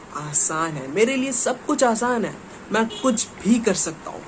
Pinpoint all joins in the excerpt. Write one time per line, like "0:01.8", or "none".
none